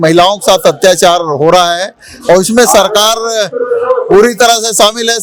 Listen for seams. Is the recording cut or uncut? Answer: uncut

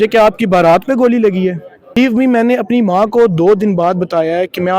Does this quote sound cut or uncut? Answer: cut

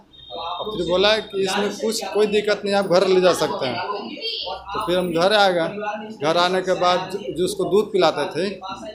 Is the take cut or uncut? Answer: uncut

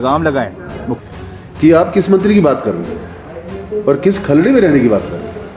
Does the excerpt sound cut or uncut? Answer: cut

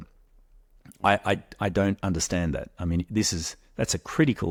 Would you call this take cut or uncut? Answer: uncut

